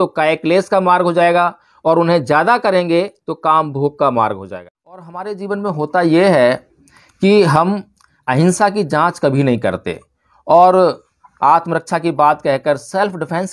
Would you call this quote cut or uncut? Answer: cut